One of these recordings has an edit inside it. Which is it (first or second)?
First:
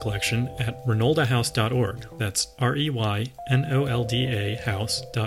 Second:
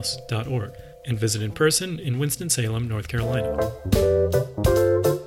second